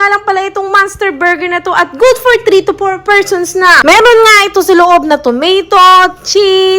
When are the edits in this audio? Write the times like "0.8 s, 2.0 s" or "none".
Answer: 3.8 s